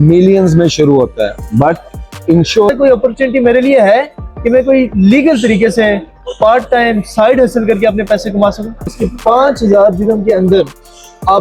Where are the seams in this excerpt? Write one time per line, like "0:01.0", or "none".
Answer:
0:02.7
0:09.1